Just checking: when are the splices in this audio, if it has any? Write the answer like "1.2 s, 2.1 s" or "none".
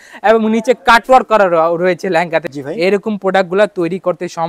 2.5 s